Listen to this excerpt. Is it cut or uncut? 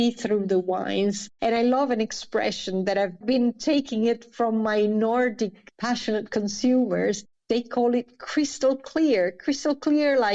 cut